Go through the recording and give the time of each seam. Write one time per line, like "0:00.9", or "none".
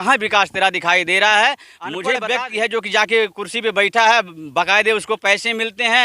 0:02.2